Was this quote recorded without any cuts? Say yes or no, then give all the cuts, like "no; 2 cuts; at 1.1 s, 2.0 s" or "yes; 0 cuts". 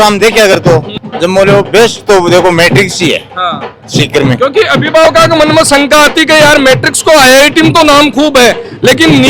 yes; 0 cuts